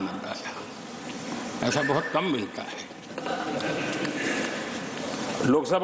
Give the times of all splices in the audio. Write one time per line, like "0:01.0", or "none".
none